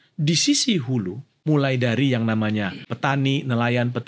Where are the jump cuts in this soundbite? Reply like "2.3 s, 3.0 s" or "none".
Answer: 1.2 s, 2.9 s